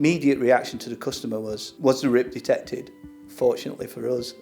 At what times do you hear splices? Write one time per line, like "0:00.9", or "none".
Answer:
0:01.6